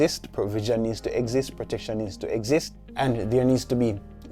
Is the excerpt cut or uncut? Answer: cut